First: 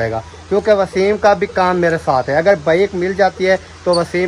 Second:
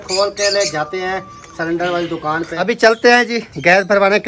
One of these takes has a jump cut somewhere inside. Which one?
second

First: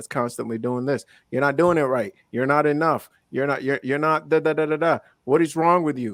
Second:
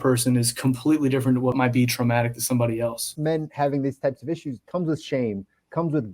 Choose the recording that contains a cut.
second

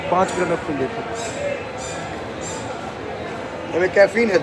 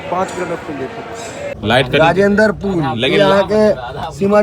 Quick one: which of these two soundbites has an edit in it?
second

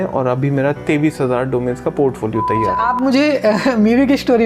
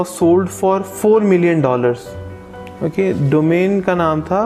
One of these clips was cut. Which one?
first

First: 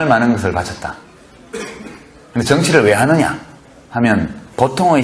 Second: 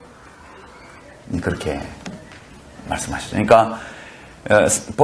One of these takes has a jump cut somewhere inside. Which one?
second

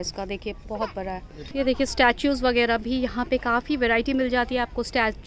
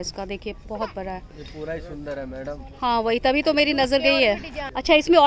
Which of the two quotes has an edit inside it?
first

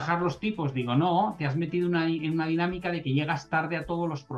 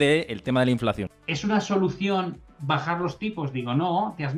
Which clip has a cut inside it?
second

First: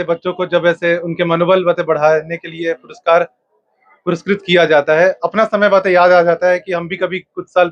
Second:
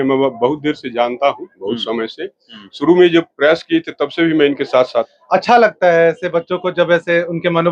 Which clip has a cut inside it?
second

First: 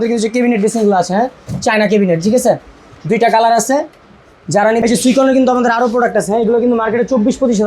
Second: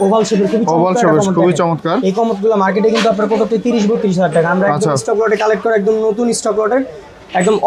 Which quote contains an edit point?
first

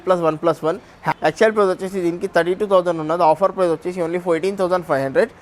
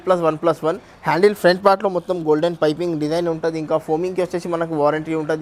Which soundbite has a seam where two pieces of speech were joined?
first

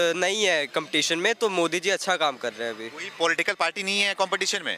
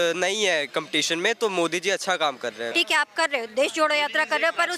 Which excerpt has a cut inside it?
second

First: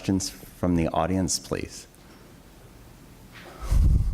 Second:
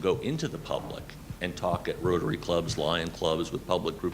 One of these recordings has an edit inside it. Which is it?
second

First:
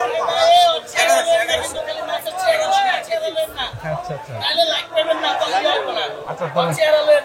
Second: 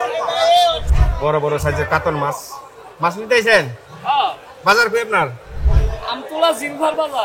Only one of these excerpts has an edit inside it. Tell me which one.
second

